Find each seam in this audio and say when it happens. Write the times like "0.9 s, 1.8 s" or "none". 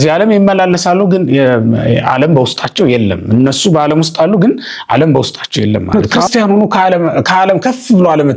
5.9 s